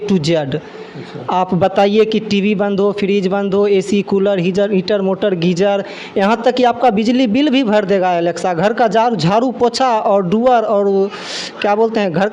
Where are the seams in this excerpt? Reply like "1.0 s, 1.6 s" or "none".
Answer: none